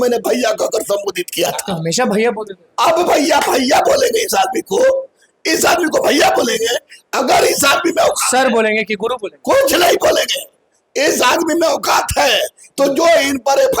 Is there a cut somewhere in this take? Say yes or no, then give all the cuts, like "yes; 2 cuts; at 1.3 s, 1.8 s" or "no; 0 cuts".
no; 0 cuts